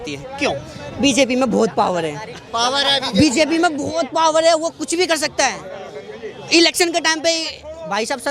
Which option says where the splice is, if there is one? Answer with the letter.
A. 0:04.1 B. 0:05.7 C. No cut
C